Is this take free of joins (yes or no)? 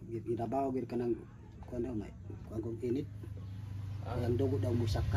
yes